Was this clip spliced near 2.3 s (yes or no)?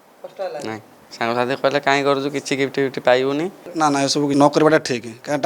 no